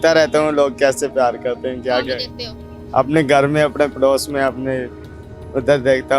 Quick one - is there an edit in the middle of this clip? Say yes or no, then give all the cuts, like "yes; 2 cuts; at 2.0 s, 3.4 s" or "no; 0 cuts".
no; 0 cuts